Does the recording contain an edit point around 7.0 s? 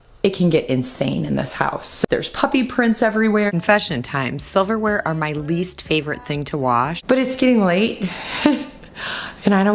yes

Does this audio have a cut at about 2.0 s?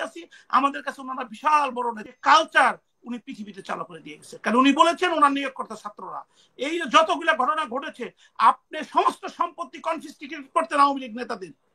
yes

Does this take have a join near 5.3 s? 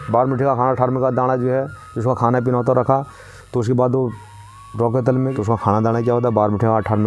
yes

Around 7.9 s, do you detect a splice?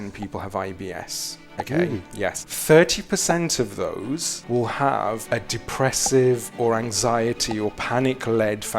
no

